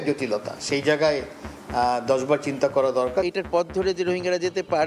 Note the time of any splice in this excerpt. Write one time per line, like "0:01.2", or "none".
0:03.3